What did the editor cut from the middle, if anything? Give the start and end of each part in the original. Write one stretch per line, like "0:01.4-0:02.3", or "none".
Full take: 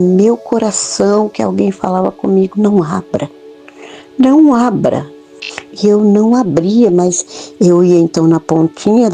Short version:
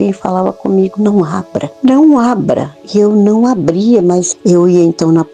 0:03.2-0:04.0
0:05.1-0:05.6
0:07.2-0:07.5

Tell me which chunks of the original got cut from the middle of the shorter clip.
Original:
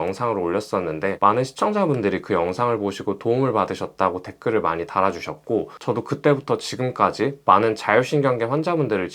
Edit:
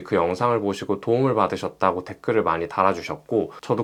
none

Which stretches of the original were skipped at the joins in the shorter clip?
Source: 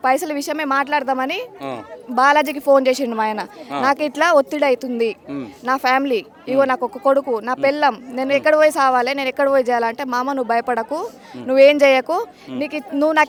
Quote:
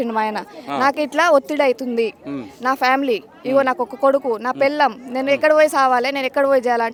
none

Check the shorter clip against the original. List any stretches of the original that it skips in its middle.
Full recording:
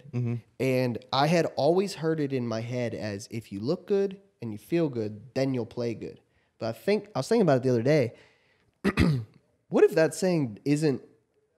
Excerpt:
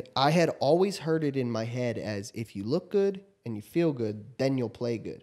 none

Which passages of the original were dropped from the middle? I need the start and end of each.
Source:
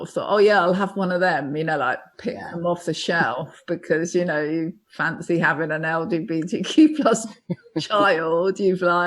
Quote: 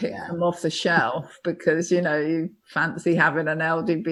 none

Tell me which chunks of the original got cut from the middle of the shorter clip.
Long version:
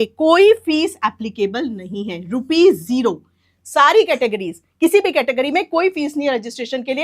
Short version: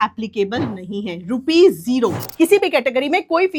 0:03.3-0:04.7

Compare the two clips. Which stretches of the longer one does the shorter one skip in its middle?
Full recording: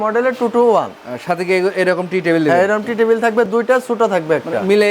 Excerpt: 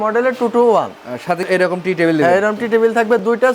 0:01.5-0:01.7

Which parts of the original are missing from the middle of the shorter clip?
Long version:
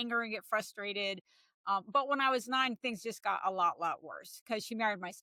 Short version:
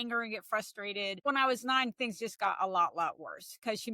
0:01.2-0:02.1

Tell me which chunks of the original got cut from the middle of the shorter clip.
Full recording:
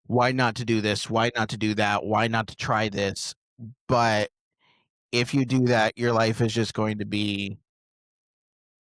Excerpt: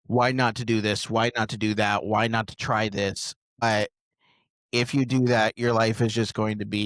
0:03.6-0:04.0

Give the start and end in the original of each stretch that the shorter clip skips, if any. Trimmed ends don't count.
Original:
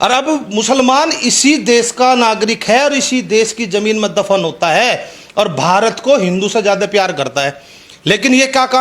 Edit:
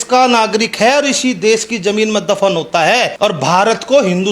0:05.0-0:05.3

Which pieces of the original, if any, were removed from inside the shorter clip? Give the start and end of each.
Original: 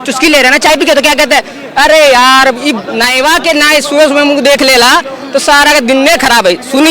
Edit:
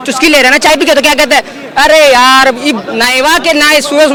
none

